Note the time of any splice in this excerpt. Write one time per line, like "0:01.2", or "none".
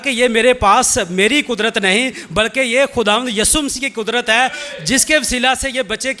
none